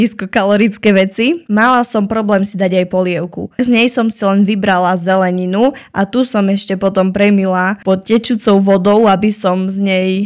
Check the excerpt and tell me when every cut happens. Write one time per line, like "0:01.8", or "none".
0:01.4
0:03.6